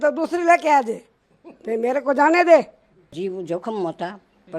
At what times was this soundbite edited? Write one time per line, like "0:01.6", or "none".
0:03.1

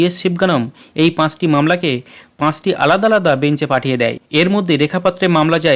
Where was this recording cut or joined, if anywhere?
0:04.2

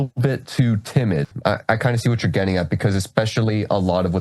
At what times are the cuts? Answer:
0:01.3

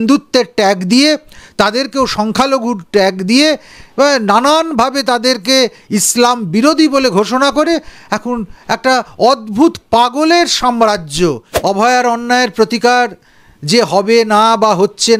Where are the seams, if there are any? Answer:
0:11.5

